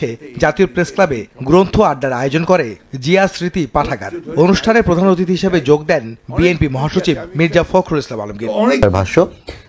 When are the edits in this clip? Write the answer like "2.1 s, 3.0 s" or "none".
8.8 s